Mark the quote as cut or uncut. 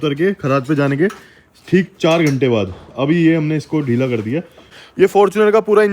cut